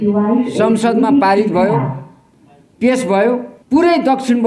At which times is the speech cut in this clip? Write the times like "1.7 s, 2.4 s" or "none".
3.5 s